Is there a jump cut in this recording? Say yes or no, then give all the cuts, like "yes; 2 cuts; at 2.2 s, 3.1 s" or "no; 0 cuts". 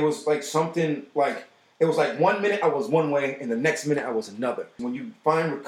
yes; 1 cut; at 4.8 s